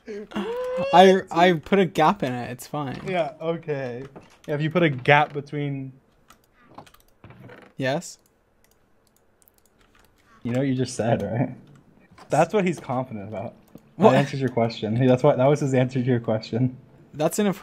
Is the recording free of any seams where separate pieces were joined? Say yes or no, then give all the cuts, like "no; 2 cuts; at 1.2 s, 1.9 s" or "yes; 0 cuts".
yes; 0 cuts